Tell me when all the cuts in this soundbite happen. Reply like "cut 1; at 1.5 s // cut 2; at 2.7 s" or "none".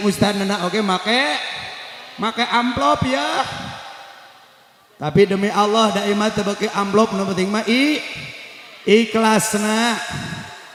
none

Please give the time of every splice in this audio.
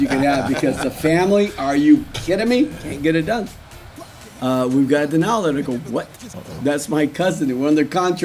cut 1; at 2.8 s

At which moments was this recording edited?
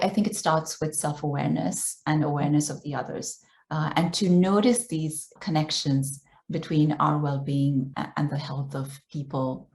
cut 1; at 5.3 s // cut 2; at 7.9 s

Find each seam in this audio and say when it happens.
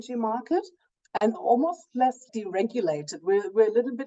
cut 1; at 1.4 s

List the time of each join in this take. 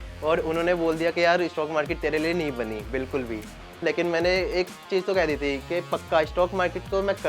cut 1; at 3.8 s

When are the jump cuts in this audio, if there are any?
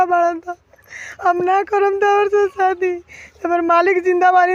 none

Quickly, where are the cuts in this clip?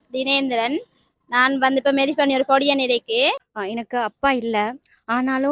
cut 1; at 3.5 s

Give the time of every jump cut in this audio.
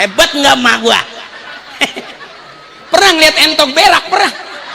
cut 1; at 1.5 s

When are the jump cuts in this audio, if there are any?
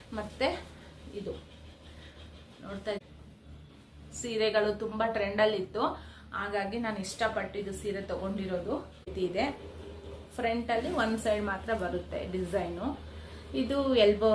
cut 1; at 3.0 s // cut 2; at 9.1 s

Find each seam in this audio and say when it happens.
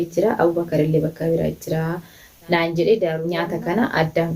cut 1; at 3.3 s

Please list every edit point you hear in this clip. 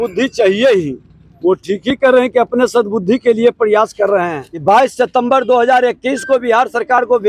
cut 1; at 4.6 s

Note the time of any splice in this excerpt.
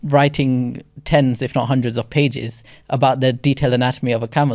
none

